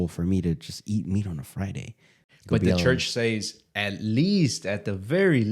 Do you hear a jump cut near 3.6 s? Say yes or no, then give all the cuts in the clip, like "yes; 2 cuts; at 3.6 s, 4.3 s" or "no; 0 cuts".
no; 1 cut; at 2.3 s